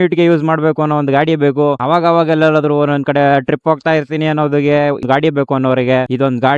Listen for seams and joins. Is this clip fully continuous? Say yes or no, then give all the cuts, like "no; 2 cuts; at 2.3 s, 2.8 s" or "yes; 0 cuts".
no; 1 cut; at 5.0 s